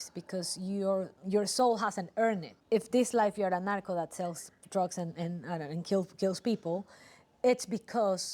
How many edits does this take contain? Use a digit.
2